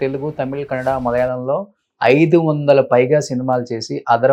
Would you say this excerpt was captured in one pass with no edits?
yes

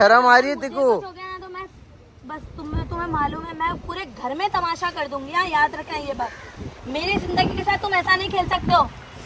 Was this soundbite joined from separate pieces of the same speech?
no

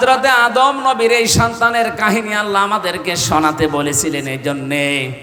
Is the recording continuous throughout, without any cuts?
yes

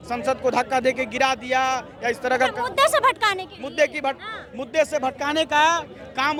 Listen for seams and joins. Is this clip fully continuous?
yes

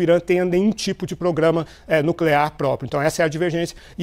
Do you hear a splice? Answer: no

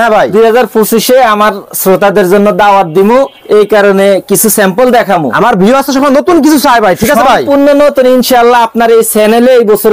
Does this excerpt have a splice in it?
no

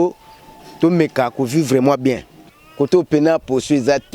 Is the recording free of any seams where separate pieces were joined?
no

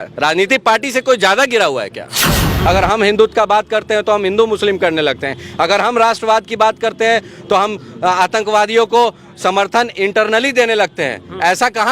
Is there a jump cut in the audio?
yes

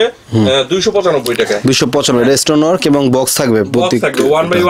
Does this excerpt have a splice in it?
no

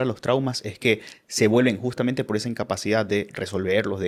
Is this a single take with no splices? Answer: yes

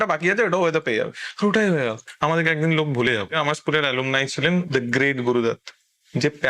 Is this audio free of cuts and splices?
no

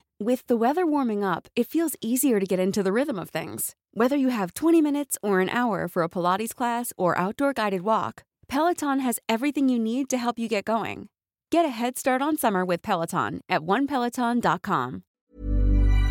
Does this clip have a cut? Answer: yes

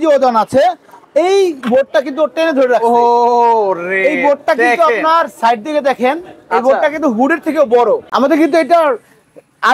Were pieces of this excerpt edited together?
yes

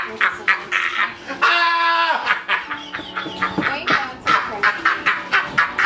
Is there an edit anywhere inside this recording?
no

